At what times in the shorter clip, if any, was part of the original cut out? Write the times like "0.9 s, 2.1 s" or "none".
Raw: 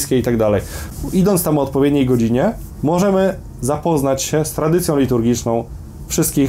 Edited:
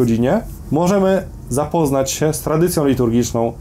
none